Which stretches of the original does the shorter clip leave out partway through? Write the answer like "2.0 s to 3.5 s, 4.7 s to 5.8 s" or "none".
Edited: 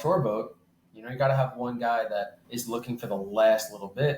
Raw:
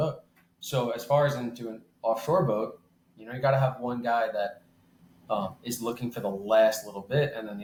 4.7 s to 5.6 s